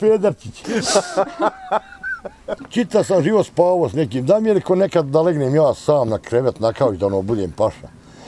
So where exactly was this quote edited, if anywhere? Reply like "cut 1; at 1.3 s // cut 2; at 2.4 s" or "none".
cut 1; at 2.6 s